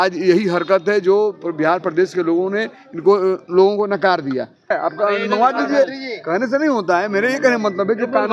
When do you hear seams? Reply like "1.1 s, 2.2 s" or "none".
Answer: 4.7 s

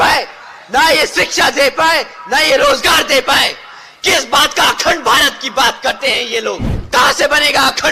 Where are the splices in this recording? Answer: 6.7 s

